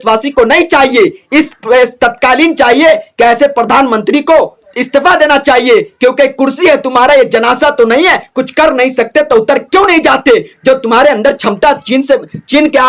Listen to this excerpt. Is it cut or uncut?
uncut